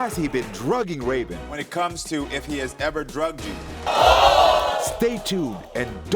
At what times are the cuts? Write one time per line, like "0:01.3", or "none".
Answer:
0:01.4
0:03.7
0:04.9